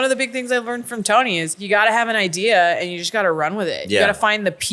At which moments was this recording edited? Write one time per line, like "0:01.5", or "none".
0:01.5

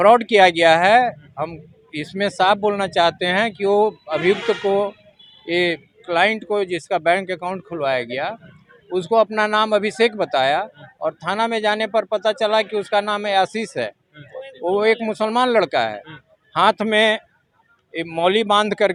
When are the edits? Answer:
none

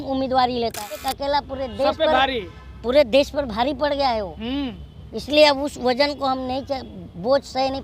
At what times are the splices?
0:01.0

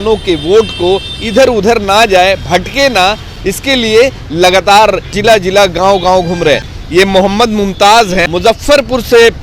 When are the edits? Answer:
0:05.1
0:06.8
0:08.3

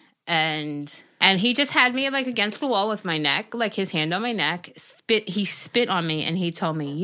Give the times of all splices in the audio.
0:01.2

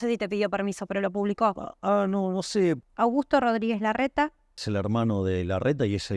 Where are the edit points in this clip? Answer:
0:02.8
0:04.6

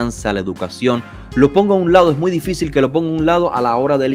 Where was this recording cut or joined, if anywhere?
none

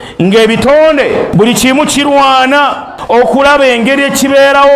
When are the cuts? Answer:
0:01.0
0:02.9

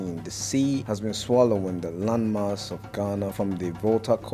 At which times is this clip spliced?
0:00.8
0:03.3

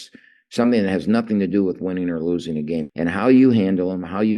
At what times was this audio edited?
0:02.9

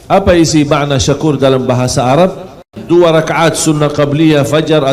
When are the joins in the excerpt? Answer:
0:02.8

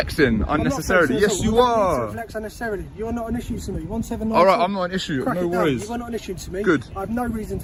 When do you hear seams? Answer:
none

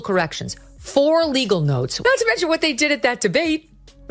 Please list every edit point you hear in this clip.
0:01.9

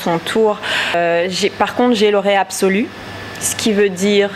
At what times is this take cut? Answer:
0:00.9

